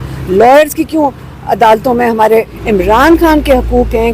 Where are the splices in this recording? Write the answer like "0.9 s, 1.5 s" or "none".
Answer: 2.5 s